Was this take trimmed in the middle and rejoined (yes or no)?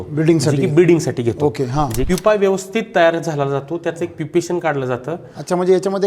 yes